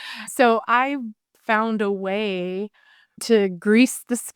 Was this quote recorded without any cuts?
no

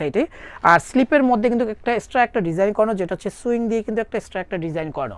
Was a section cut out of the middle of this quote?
no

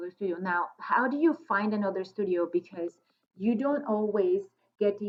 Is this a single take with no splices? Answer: yes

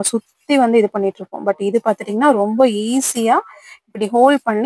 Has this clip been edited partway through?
no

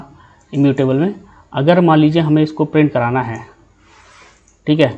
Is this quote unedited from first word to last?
yes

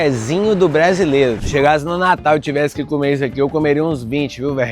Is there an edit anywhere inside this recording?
yes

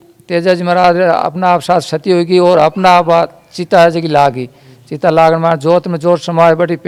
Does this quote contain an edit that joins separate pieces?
no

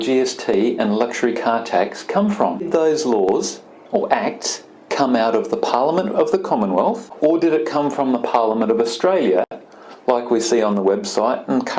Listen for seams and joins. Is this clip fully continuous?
no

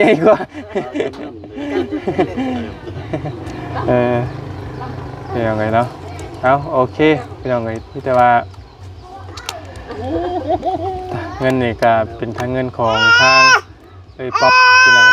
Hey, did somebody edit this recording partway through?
no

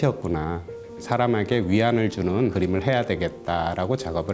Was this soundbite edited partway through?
yes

